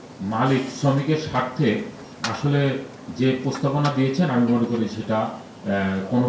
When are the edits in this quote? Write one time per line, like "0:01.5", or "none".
none